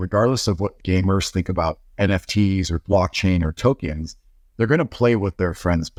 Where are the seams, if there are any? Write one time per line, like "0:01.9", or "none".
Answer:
none